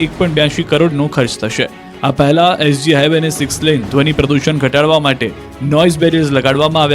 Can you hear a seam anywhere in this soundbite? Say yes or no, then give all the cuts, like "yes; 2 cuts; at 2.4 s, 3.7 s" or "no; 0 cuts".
yes; 1 cut; at 3.2 s